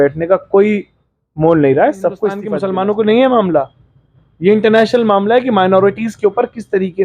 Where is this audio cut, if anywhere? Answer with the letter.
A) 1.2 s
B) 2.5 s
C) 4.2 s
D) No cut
B